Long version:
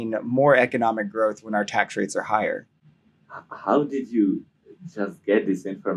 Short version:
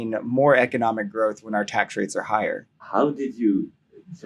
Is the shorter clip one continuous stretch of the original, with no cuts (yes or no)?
no